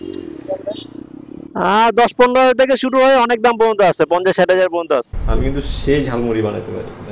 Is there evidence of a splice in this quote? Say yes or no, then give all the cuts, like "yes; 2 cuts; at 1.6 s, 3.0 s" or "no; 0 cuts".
yes; 1 cut; at 5.1 s